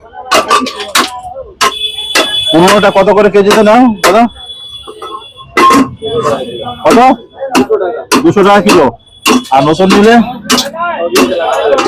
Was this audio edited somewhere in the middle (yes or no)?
no